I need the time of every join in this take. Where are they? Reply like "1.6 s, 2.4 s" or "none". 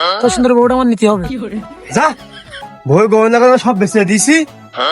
1.4 s